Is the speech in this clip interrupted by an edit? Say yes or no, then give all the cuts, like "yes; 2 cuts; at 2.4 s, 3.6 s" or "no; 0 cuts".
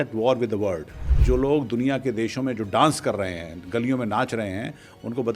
yes; 1 cut; at 1.0 s